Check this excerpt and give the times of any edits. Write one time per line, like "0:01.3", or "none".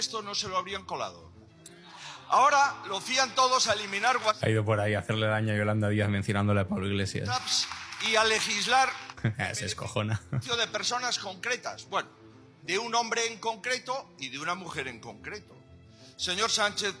none

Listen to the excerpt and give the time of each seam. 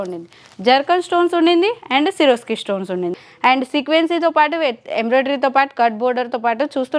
0:03.3

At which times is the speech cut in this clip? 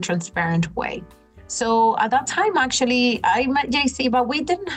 none

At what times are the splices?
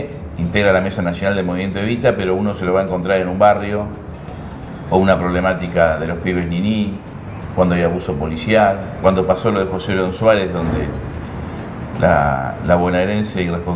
0:09.7

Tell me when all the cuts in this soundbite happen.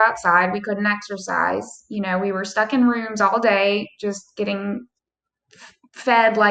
none

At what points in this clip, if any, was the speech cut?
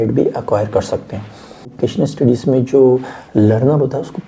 0:01.7

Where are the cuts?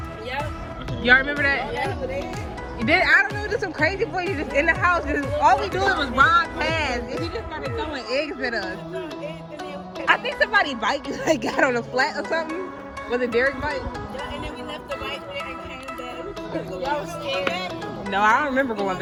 none

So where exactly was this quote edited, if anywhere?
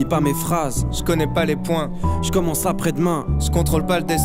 none

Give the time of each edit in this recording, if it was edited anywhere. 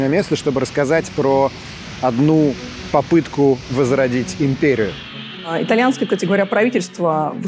0:05.5

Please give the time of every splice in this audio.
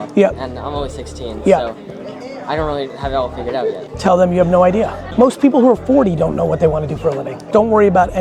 0:03.9
0:05.0
0:07.4

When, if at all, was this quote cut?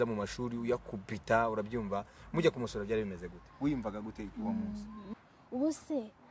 0:05.0

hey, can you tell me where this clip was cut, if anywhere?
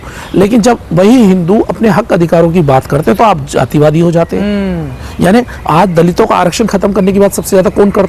none

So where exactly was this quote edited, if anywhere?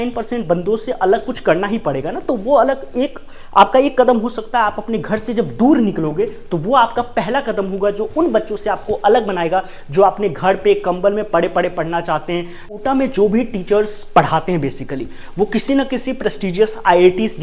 0:12.8

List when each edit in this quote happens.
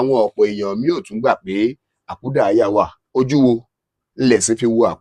0:03.0

